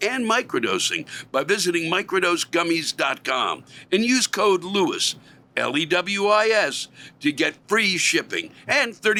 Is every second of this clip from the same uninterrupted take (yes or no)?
yes